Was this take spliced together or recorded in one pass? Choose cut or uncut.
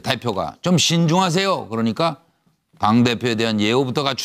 uncut